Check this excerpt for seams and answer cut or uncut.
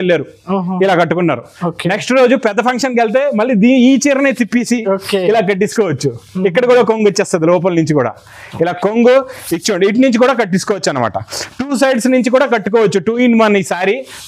uncut